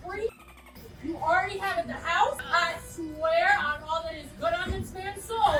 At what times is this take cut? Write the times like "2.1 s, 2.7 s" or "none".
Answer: none